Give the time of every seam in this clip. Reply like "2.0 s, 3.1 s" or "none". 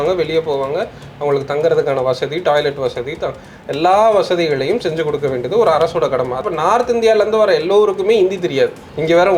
6.5 s